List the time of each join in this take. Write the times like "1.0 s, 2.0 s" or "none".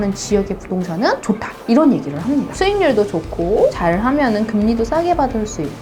2.5 s